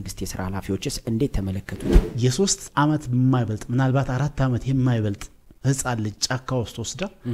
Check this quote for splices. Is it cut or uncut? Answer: cut